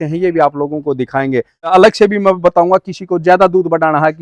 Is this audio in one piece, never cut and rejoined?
no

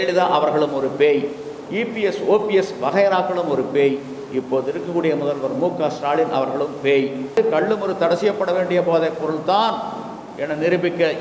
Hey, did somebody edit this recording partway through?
yes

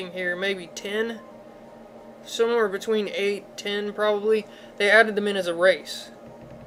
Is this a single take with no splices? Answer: yes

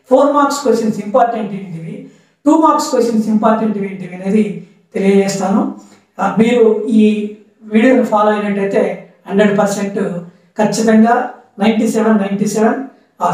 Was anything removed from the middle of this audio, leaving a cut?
no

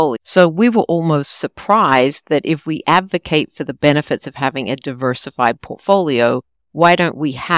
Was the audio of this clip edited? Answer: no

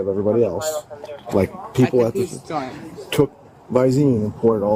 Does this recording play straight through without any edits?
yes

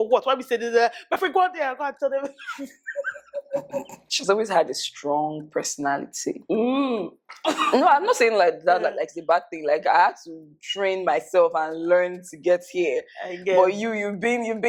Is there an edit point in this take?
no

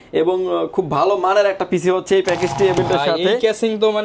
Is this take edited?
yes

